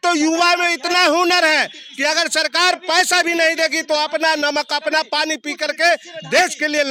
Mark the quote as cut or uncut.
uncut